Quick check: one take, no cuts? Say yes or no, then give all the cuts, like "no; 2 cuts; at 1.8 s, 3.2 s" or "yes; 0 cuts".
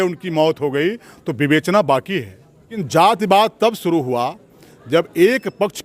no; 1 cut; at 2.8 s